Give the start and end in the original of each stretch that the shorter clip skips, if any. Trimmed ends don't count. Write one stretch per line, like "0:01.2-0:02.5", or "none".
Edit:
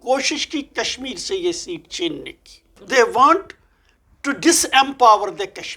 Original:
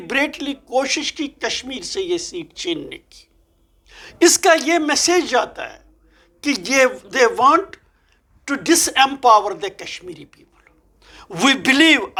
0:03.5-0:07.0